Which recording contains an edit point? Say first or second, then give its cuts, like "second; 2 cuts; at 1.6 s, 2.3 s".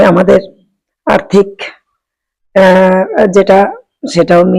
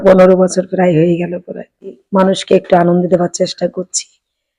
second; 1 cut; at 2.0 s